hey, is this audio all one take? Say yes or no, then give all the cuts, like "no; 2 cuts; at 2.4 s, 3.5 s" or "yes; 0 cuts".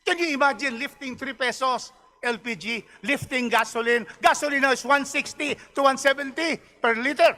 yes; 0 cuts